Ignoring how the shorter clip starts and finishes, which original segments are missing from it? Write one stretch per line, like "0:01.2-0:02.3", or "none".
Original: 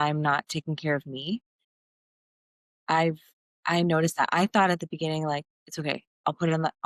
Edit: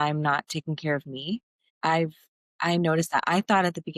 0:01.6-0:02.7